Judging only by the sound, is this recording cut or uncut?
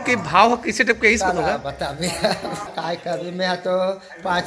uncut